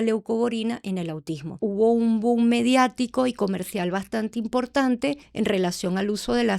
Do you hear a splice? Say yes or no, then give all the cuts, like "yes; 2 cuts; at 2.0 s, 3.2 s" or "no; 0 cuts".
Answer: yes; 2 cuts; at 1.6 s, 5.2 s